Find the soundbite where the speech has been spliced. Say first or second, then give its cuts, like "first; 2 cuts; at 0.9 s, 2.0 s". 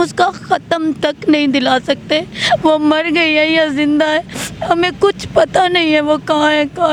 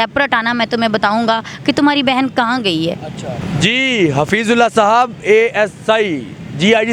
second; 1 cut; at 3.3 s